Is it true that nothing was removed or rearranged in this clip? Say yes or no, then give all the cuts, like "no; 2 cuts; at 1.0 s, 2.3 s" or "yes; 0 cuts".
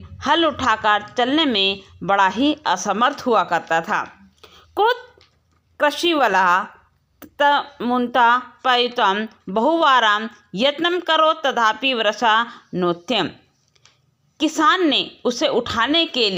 yes; 0 cuts